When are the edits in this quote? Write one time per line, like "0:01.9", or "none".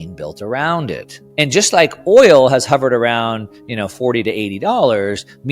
0:01.1

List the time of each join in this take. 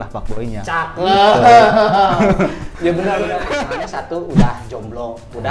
none

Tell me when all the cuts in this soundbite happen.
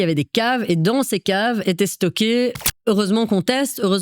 0:02.6

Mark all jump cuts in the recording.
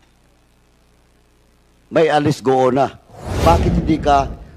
0:03.4

